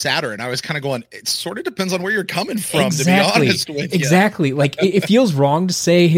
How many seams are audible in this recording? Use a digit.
0